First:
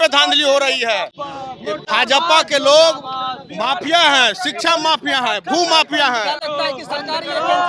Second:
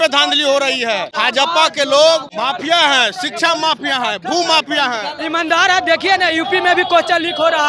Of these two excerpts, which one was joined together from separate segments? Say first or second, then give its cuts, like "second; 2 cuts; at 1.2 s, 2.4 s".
second; 3 cuts; at 1.1 s, 2.3 s, 5.1 s